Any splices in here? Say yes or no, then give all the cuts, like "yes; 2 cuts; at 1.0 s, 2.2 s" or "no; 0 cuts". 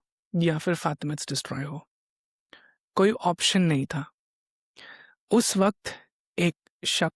no; 0 cuts